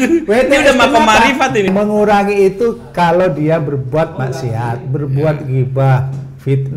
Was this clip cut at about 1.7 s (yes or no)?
yes